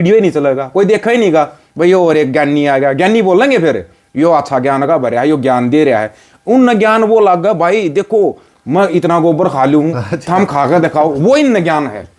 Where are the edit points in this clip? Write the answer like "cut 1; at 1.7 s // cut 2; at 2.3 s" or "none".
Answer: none